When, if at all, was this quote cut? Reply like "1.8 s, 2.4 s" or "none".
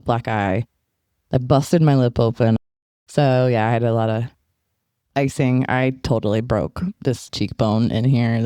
2.6 s